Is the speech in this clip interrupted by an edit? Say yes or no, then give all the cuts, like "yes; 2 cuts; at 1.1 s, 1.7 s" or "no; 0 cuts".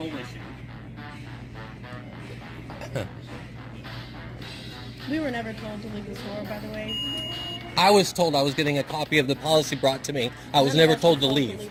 no; 0 cuts